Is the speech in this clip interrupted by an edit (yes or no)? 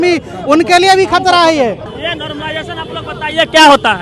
no